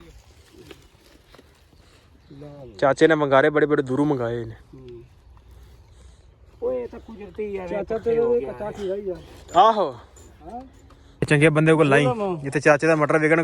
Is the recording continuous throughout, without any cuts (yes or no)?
no